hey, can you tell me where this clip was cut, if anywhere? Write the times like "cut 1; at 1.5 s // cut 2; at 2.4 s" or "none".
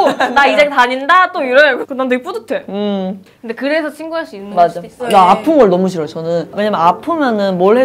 cut 1; at 5.1 s // cut 2; at 6.5 s

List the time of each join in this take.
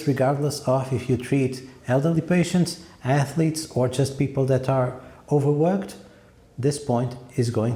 none

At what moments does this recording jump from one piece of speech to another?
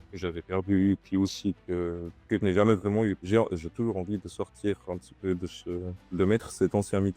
cut 1; at 3.2 s

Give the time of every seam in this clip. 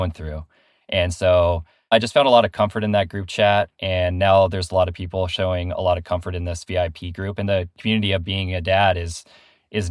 none

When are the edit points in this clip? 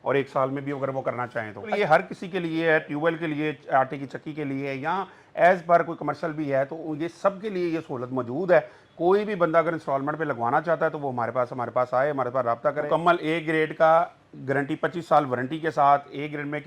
cut 1; at 1.7 s // cut 2; at 12.9 s

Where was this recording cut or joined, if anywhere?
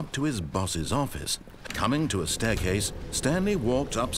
cut 1; at 1.6 s

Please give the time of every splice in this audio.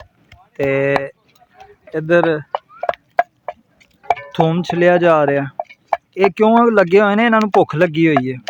none

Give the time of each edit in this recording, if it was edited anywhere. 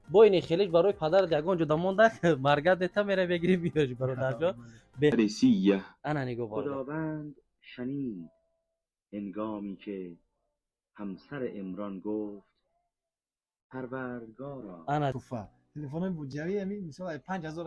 cut 1; at 5.1 s // cut 2; at 15.1 s

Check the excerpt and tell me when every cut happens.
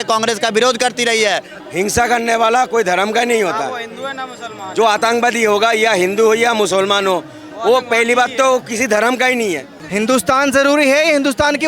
cut 1; at 1.5 s // cut 2; at 9.9 s

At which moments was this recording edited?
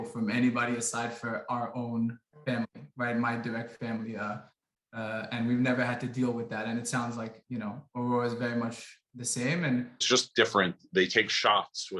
cut 1; at 10.0 s

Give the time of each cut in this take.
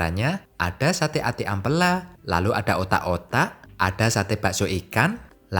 cut 1; at 3.6 s

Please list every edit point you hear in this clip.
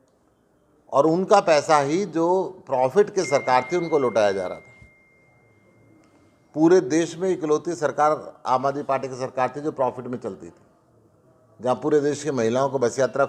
none

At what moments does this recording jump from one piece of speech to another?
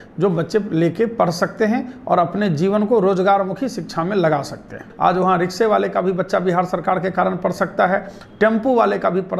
cut 1; at 4.9 s

